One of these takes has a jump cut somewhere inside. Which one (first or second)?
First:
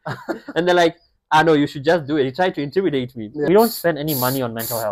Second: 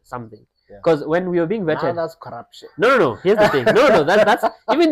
first